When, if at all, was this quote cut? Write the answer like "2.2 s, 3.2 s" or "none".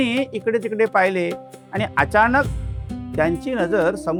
none

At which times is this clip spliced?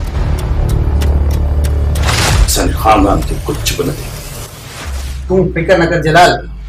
none

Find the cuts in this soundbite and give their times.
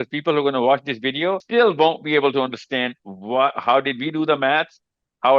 1.4 s

